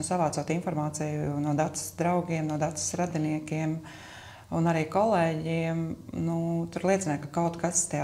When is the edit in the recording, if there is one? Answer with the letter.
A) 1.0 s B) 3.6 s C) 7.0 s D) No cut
D